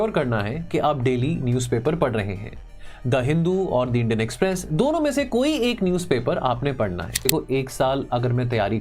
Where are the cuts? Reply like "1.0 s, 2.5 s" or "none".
7.3 s

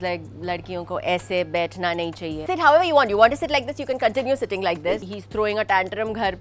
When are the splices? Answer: 2.4 s, 5.0 s

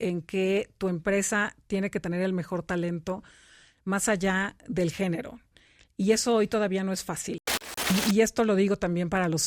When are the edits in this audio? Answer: 7.6 s

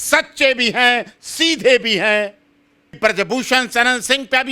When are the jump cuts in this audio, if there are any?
3.0 s

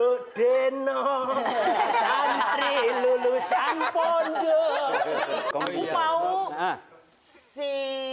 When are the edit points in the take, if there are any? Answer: 5.5 s

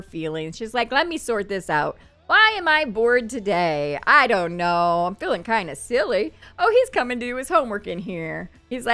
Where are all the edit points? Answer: none

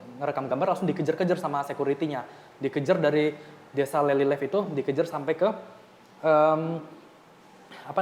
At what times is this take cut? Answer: none

